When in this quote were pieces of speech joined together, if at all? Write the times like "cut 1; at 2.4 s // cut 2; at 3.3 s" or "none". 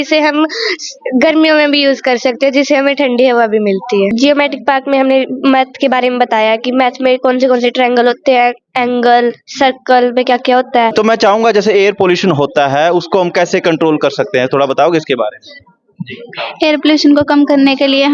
cut 1; at 4.1 s // cut 2; at 10.9 s